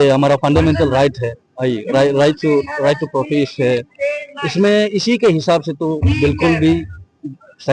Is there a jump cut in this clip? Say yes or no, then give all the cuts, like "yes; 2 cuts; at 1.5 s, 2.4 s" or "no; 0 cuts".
no; 0 cuts